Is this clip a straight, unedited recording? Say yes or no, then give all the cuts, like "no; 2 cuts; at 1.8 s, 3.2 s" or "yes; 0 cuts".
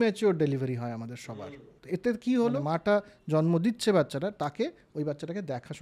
no; 2 cuts; at 1.7 s, 2.6 s